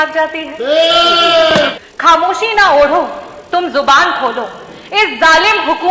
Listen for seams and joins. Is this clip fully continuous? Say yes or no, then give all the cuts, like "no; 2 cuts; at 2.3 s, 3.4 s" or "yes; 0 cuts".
no; 1 cut; at 1.7 s